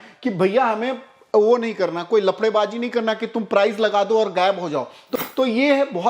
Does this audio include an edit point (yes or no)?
yes